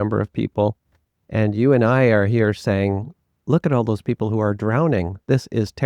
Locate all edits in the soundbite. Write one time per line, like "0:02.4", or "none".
none